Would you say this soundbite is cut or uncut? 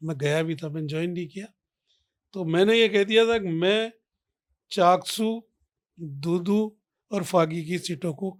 uncut